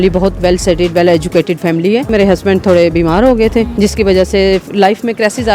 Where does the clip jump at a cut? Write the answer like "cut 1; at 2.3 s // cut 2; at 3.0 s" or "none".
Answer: cut 1; at 2.1 s // cut 2; at 3.7 s